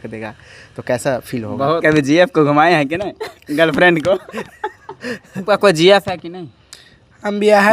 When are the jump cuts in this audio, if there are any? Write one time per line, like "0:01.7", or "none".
0:01.8
0:05.4